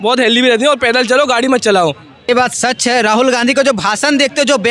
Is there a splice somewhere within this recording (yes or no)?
yes